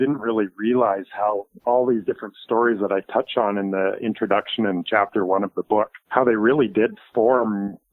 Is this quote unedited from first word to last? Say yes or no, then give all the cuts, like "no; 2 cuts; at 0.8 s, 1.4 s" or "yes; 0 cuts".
no; 2 cuts; at 1.5 s, 6.0 s